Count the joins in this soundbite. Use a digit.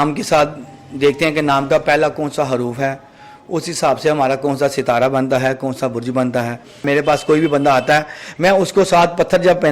1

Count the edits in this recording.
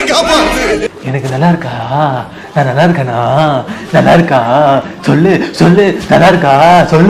1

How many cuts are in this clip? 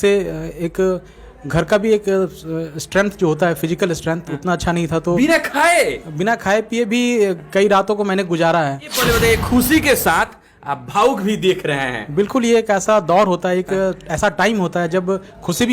1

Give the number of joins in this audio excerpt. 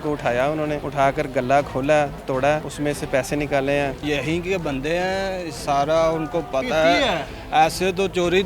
3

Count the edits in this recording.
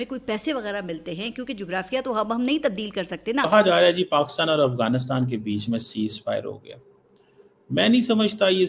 1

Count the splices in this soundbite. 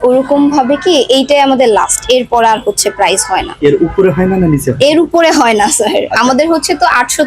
1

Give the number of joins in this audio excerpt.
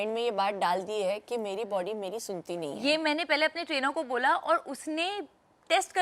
0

